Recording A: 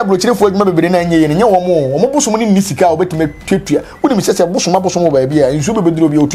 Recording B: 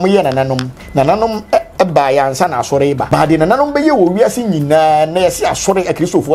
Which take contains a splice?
B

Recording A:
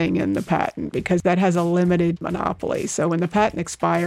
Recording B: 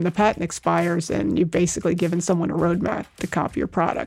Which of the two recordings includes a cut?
A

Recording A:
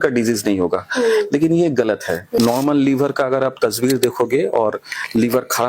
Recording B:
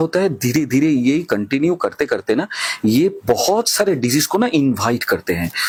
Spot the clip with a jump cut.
A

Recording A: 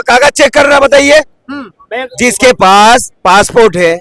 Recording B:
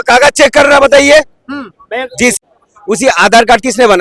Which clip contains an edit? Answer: B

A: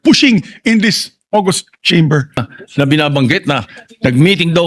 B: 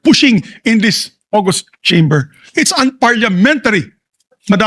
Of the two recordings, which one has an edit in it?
A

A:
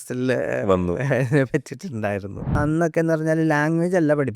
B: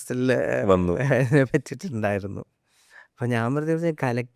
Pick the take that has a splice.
A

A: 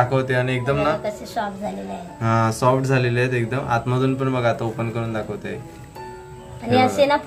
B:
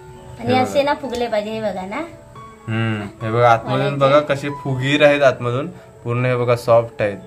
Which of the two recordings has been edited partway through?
B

